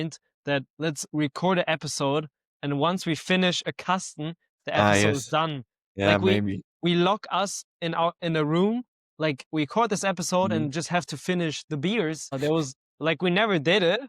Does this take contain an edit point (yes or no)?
yes